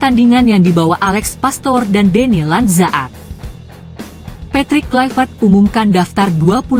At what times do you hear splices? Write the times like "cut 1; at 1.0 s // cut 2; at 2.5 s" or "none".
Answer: cut 1; at 3.1 s // cut 2; at 4.3 s